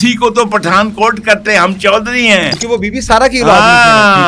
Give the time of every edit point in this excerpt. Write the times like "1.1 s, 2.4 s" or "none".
2.6 s